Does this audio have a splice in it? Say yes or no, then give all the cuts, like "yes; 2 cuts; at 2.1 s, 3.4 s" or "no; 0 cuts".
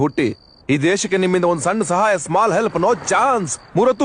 no; 0 cuts